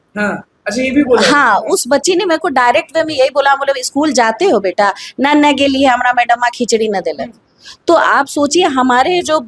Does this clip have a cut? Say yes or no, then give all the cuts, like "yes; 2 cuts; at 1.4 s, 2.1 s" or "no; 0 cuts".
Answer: no; 0 cuts